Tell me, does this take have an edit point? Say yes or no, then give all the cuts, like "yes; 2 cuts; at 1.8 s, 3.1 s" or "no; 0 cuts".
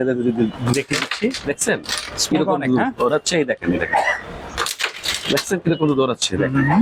no; 0 cuts